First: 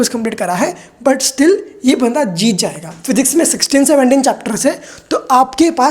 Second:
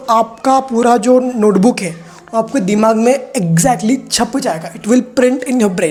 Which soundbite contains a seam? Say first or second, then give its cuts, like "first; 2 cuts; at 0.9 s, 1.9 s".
first; 1 cut; at 2.9 s